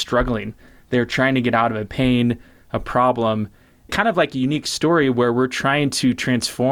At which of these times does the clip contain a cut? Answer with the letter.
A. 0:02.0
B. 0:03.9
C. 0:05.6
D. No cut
B